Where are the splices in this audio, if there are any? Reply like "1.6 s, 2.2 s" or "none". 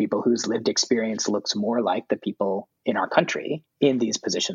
2.7 s, 3.7 s